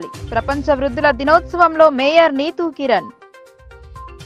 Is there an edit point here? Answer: no; 0 cuts

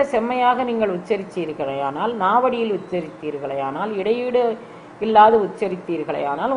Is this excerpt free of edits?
yes; 0 cuts

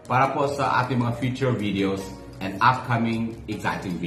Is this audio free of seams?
yes; 0 cuts

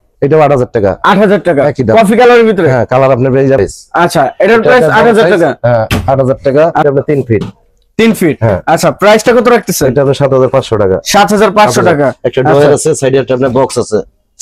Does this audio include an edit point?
yes; 2 cuts; at 3.6 s, 6.8 s

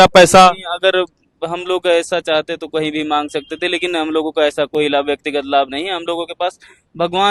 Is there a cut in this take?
no; 0 cuts

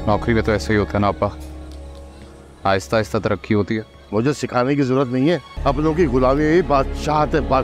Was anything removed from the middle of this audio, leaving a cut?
yes; 1 cut; at 5.5 s

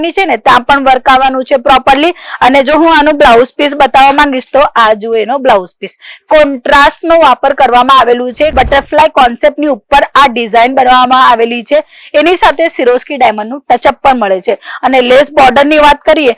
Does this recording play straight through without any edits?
no; 1 cut; at 8.5 s

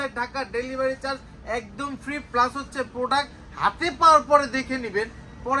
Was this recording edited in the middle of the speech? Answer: no; 0 cuts

